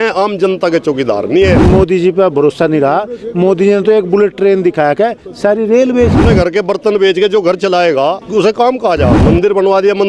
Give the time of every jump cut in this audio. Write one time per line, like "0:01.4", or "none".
0:01.6
0:06.2
0:08.2
0:09.2